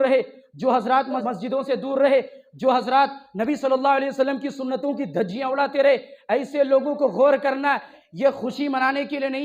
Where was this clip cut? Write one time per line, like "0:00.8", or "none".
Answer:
0:01.2
0:08.0